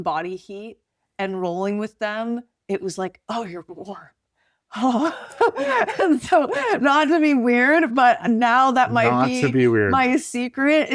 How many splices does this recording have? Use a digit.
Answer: 0